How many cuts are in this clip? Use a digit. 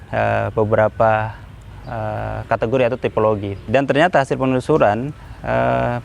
1